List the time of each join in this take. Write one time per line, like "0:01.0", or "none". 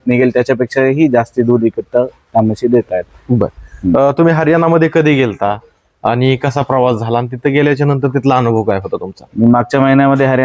none

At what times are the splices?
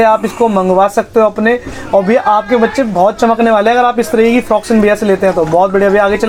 none

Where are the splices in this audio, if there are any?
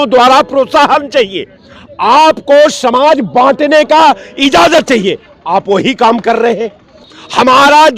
none

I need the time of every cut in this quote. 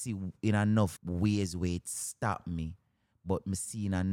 0:01.0

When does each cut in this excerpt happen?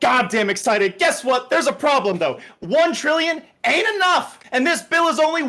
0:04.4

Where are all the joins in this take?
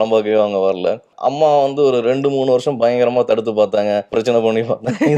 0:01.1
0:04.1

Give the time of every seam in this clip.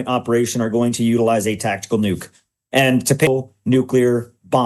0:03.3

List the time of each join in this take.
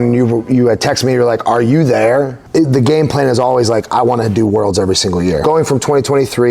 0:02.4
0:05.4

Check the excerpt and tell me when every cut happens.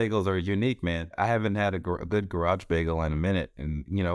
0:01.2

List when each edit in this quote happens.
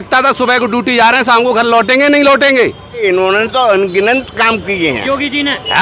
0:03.0

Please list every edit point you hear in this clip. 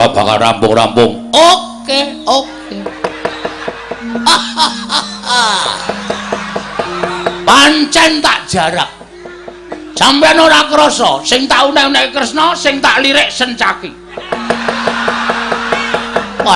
none

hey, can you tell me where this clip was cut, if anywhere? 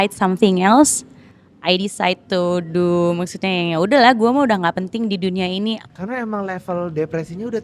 0:05.9

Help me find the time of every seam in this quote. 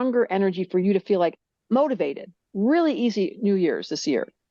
none

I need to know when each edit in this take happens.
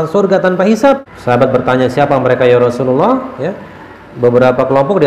0:01.1

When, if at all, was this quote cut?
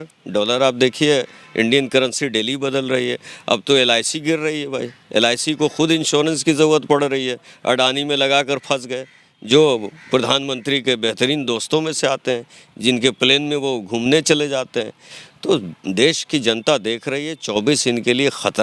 none

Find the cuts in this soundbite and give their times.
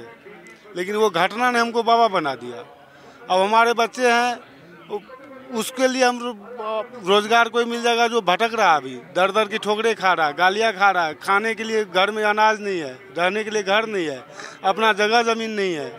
none

